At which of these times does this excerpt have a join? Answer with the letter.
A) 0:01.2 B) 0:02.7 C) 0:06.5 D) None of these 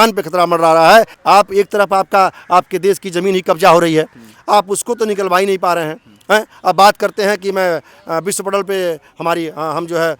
A